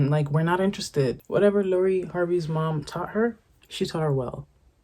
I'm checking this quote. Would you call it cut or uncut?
cut